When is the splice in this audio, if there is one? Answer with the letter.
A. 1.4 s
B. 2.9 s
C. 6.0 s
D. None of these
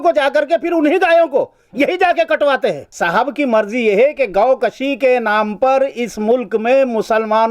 B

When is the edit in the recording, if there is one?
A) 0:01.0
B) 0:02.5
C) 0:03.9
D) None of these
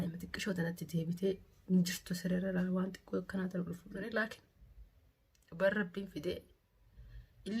C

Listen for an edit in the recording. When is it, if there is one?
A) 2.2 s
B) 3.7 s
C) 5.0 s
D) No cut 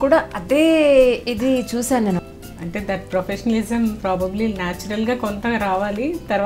A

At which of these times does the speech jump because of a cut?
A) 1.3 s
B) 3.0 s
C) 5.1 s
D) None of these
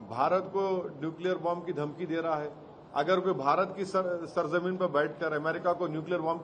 D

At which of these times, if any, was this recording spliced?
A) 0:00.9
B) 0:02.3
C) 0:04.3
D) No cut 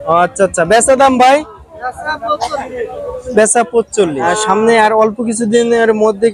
C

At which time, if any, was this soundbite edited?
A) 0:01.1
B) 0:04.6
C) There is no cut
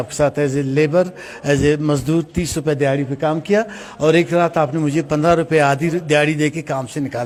C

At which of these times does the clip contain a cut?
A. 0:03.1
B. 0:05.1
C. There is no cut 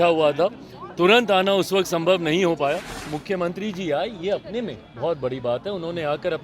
A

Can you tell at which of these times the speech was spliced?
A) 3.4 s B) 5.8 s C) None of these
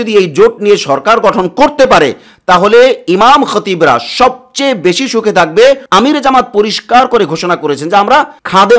B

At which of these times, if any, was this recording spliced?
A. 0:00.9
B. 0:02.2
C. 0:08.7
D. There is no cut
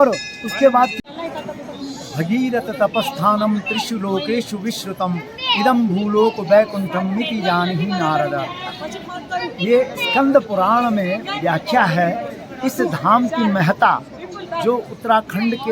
A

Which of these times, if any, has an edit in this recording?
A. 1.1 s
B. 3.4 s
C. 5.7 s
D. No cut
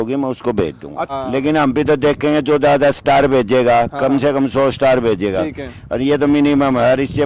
A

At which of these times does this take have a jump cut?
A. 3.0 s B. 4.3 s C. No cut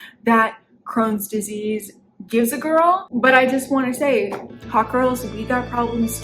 A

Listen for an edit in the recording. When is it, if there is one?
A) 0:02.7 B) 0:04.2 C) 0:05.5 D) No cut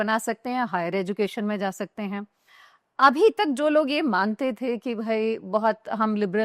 A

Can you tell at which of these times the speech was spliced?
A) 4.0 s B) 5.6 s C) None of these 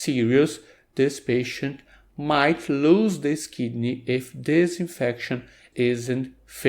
B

